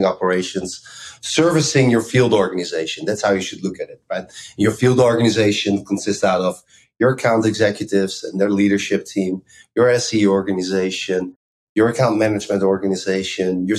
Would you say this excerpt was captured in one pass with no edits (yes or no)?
yes